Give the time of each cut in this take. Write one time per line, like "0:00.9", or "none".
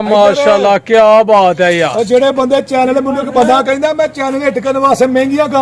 none